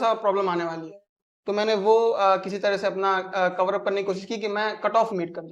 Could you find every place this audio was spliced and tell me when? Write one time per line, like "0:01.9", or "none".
none